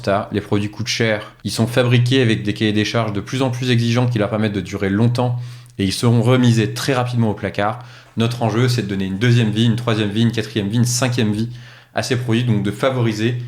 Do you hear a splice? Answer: yes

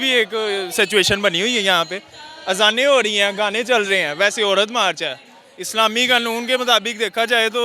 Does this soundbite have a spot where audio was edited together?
no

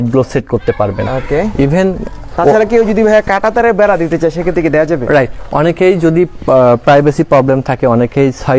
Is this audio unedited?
yes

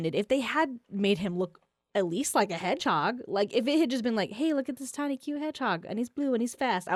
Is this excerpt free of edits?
yes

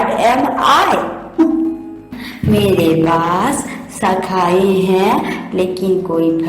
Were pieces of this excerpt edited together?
yes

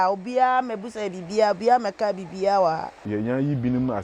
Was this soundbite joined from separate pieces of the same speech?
yes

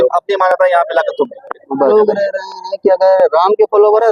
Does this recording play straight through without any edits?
no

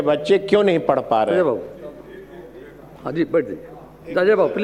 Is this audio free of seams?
yes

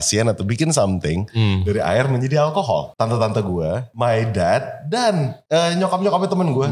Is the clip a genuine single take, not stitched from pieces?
no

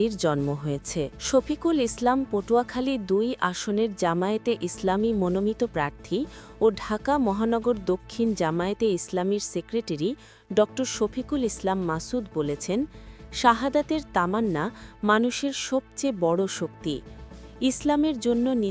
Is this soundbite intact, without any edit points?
no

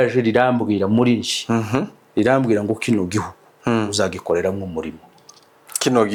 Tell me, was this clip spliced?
no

